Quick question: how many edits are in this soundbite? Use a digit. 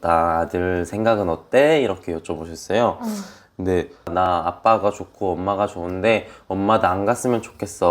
1